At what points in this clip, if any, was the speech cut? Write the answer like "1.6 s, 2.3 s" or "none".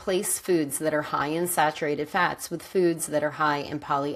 none